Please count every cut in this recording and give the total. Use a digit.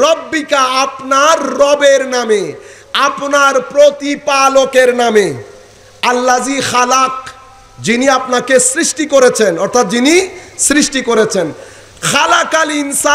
0